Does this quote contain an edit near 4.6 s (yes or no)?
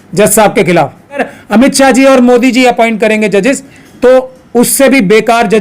no